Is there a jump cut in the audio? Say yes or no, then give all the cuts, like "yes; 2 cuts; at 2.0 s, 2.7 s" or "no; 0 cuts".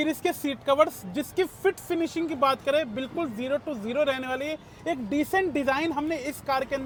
no; 0 cuts